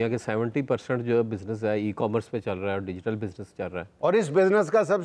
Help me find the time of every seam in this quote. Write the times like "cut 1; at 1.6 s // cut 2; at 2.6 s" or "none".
cut 1; at 3.9 s